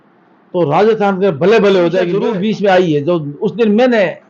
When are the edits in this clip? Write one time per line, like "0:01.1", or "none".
0:02.1